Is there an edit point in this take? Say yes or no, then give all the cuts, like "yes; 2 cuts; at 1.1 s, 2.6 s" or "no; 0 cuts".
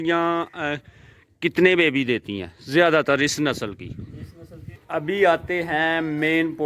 yes; 1 cut; at 4.8 s